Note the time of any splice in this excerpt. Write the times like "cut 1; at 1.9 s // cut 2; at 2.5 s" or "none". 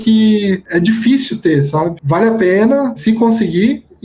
cut 1; at 1.9 s // cut 2; at 3.0 s